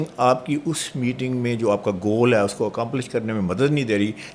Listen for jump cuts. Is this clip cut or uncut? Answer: uncut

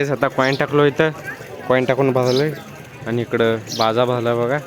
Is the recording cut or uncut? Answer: uncut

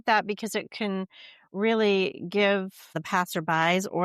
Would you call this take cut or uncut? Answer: cut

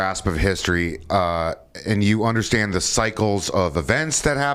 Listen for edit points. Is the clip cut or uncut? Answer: uncut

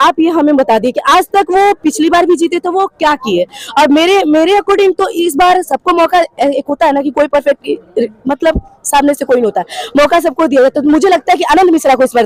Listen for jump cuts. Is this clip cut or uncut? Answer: uncut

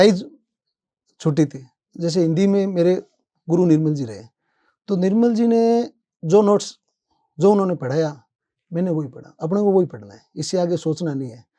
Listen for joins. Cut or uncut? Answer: cut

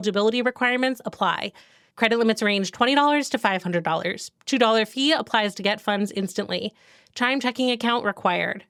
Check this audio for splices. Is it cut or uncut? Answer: uncut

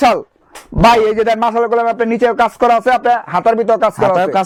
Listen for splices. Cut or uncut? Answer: uncut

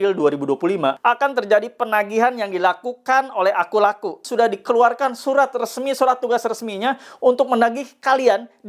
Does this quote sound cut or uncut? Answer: cut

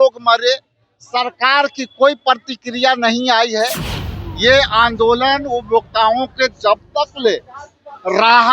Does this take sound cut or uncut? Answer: cut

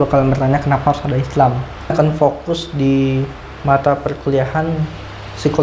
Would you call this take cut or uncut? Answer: cut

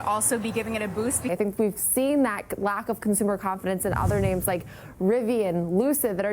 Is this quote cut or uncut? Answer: cut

